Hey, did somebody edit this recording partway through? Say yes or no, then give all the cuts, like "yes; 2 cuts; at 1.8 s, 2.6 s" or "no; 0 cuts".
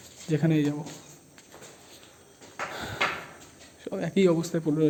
no; 0 cuts